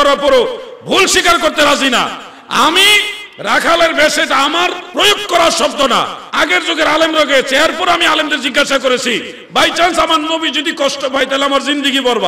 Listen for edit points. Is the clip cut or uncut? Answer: cut